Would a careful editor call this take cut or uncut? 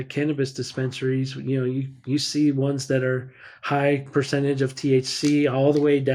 uncut